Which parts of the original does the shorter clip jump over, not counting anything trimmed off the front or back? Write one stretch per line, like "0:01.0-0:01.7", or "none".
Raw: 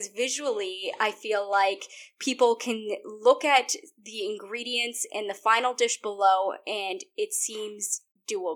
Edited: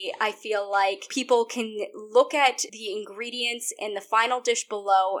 0:01.9-0:02.2
0:03.8-0:04.0